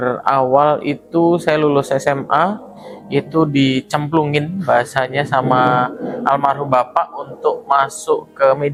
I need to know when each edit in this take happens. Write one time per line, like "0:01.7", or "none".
none